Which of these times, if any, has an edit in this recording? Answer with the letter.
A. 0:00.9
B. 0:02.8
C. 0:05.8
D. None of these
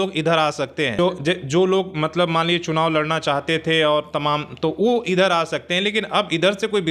A